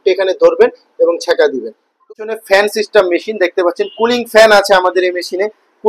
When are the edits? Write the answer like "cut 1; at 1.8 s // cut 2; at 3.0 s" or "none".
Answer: cut 1; at 2.0 s